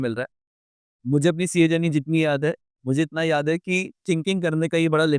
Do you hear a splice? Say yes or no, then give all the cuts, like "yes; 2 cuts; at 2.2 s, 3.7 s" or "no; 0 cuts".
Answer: no; 0 cuts